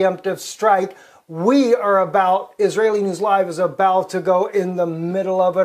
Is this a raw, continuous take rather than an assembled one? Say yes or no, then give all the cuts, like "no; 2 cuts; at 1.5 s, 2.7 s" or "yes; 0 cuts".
no; 1 cut; at 3.7 s